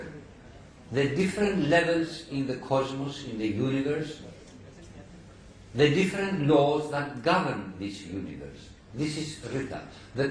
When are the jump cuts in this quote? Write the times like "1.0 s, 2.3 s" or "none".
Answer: 6.8 s